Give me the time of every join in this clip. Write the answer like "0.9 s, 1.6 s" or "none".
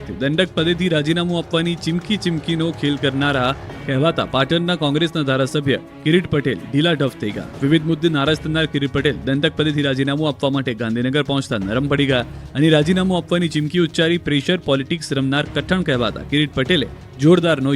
1.9 s